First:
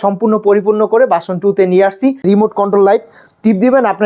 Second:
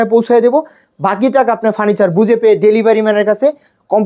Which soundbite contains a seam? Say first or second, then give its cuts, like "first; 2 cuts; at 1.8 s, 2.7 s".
first; 1 cut; at 2.3 s